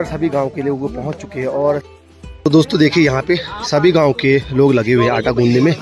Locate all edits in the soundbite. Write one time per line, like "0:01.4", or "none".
0:01.9